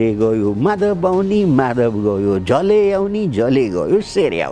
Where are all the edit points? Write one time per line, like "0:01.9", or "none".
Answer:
none